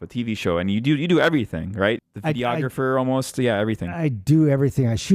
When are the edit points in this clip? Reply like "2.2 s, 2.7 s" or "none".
2.1 s